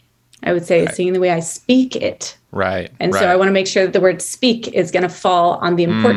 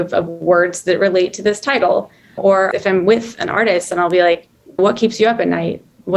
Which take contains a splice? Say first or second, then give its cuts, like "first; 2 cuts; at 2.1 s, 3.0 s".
second; 2 cuts; at 2.5 s, 4.8 s